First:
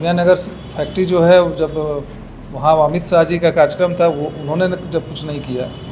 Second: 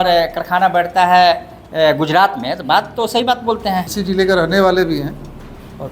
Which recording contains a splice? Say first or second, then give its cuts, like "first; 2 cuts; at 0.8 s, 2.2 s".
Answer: second; 1 cut; at 3.9 s